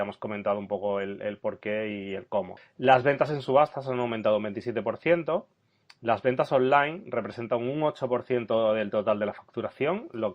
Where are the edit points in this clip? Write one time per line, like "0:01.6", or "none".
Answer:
0:02.6